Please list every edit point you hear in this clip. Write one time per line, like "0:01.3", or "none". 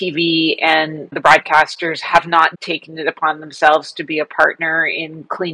0:01.2
0:02.6